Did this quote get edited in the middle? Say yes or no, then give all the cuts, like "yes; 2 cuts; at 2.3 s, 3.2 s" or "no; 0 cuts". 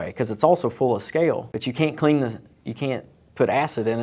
yes; 1 cut; at 1.6 s